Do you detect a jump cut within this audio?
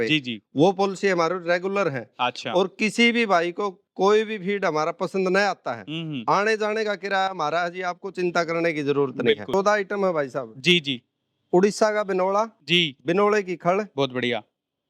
yes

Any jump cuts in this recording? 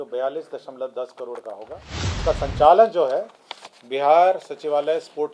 yes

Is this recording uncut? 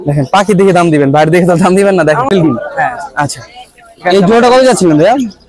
no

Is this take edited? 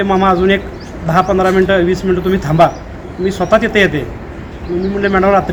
no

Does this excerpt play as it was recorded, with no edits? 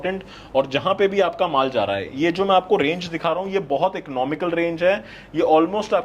yes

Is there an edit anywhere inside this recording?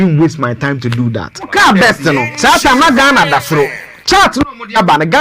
yes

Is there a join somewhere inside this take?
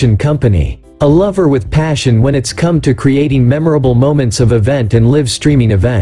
no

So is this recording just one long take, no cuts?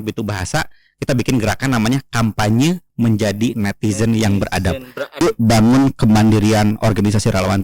no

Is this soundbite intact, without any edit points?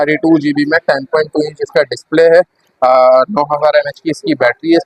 yes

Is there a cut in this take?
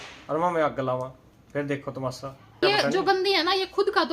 yes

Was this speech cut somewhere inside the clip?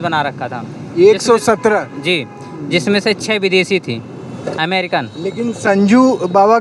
no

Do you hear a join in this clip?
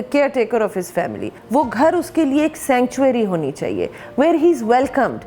yes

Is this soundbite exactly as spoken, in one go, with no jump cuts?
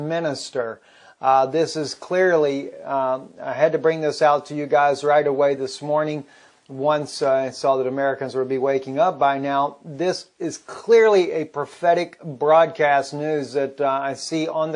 no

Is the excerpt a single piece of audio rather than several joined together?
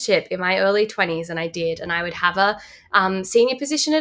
yes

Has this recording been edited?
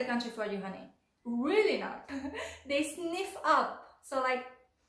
yes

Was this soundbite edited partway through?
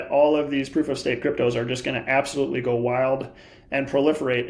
no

